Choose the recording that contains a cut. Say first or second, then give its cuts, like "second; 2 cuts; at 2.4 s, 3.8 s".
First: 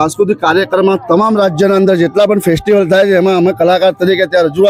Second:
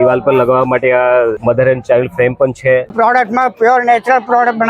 second; 2 cuts; at 1.4 s, 2.9 s